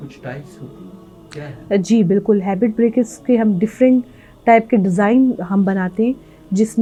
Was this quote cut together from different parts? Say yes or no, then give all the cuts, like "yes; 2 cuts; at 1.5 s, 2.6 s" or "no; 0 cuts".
no; 0 cuts